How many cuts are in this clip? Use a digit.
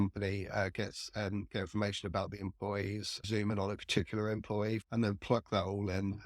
2